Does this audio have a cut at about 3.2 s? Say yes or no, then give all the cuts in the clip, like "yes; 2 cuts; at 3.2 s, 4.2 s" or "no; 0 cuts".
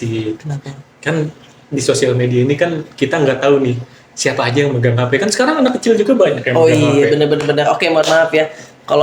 no; 0 cuts